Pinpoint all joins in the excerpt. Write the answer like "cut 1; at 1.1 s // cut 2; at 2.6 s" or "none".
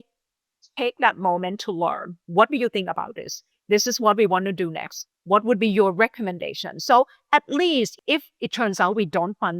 cut 1; at 2.1 s // cut 2; at 7.9 s